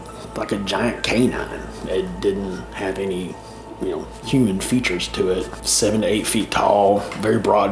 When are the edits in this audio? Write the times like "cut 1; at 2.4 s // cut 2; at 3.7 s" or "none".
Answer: cut 1; at 5.6 s